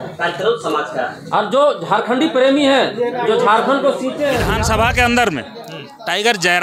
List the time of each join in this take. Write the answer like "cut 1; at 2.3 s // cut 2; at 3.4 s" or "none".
cut 1; at 4.5 s